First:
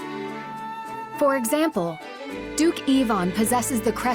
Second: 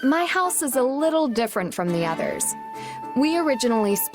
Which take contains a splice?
first; 1 cut; at 1.2 s

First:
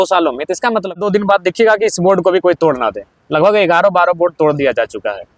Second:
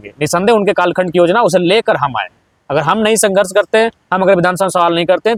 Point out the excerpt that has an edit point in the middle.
first; 1 cut; at 1.0 s

